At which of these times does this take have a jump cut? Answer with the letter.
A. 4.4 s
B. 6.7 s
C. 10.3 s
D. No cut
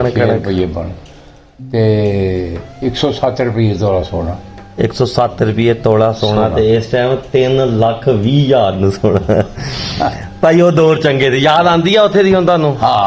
D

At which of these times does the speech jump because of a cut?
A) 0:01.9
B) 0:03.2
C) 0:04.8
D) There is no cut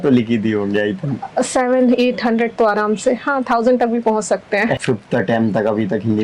C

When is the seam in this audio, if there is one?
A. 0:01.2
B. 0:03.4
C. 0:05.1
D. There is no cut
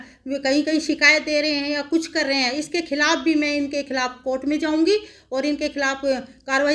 D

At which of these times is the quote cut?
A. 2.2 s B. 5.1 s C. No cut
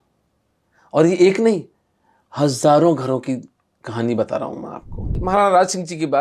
B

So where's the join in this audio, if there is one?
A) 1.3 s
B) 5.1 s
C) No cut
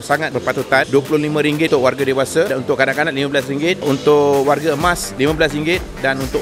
C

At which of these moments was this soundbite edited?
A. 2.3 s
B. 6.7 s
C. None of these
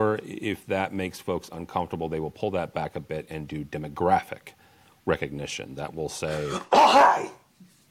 B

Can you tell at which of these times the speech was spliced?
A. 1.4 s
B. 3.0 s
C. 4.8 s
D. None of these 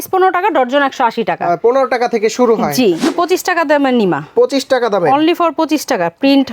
B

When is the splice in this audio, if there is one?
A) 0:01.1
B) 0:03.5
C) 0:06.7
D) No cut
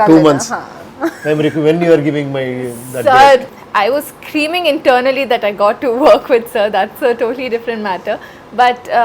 B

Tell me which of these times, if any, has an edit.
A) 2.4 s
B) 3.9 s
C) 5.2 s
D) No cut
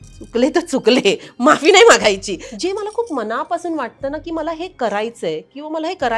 A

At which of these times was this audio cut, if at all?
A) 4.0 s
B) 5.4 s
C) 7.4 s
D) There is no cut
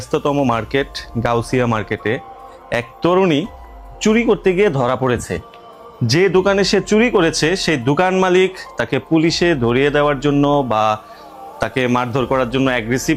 D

